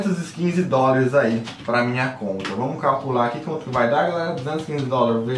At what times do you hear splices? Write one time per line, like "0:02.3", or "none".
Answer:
0:01.5